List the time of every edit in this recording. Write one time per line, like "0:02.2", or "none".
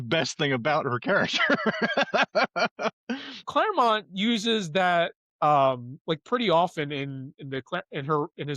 0:03.4